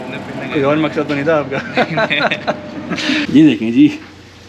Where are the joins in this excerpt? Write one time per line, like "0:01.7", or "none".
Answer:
0:03.2